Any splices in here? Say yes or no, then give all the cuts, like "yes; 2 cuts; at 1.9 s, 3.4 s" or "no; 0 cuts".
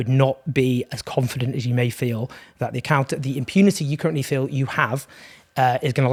no; 0 cuts